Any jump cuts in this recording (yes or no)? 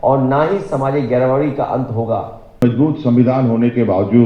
yes